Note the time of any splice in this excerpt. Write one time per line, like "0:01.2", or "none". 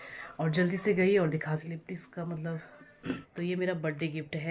0:01.6
0:03.3